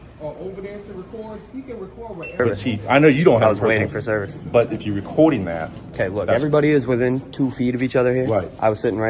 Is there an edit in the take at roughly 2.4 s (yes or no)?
yes